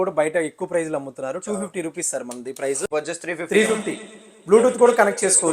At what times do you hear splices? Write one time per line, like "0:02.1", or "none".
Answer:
0:02.9